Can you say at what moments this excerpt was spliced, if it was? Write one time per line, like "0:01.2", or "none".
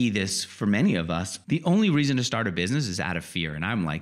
0:01.3